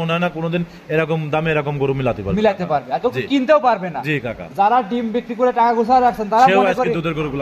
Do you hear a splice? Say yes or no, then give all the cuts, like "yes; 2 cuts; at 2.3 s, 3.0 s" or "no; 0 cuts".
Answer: no; 0 cuts